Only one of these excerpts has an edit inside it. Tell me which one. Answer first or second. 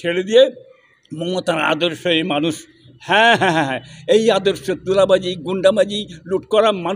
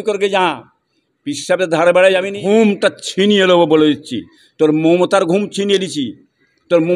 second